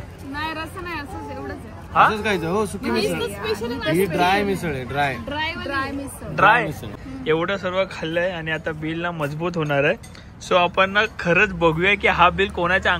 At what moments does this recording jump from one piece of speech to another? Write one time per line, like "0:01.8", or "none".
0:04.7
0:06.9